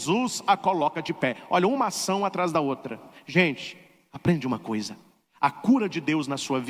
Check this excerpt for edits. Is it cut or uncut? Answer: uncut